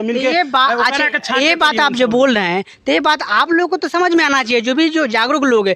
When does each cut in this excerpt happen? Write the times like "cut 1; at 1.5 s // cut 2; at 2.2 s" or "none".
none